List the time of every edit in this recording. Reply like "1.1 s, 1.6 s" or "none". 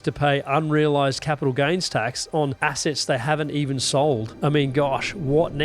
2.5 s, 4.3 s